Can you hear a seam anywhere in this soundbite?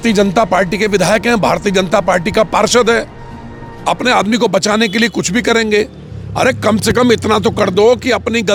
no; 0 cuts

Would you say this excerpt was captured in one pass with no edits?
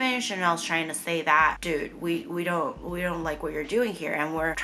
yes; 0 cuts

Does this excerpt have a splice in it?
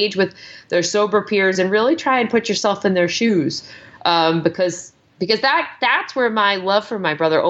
no; 0 cuts

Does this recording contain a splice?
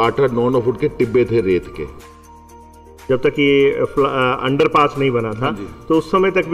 yes; 1 cut; at 2.6 s

